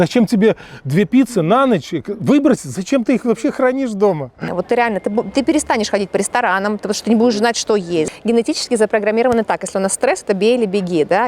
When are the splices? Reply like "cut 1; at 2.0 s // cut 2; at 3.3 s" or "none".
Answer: cut 1; at 4.5 s // cut 2; at 8.1 s